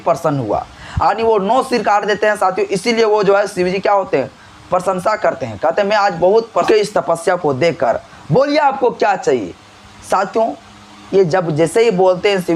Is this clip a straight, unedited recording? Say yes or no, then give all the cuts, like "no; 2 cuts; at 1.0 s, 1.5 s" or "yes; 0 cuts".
no; 1 cut; at 6.7 s